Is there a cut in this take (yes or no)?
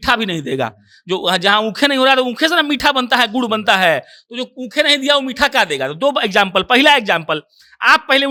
no